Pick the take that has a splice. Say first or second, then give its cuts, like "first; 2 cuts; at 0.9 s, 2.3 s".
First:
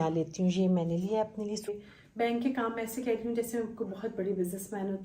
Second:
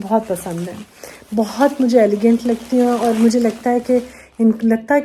first; 1 cut; at 1.7 s